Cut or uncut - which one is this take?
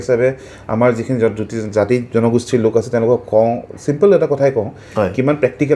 uncut